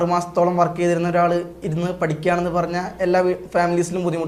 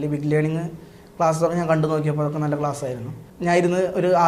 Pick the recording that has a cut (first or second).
second